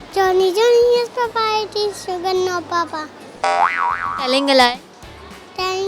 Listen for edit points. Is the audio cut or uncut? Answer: uncut